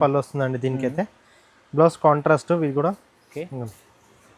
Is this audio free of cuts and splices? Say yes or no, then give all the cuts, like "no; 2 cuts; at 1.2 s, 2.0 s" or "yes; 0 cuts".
yes; 0 cuts